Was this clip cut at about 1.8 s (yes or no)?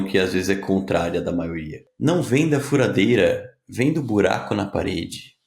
yes